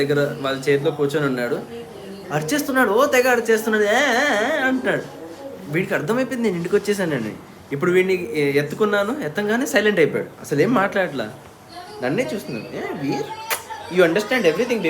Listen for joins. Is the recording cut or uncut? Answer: uncut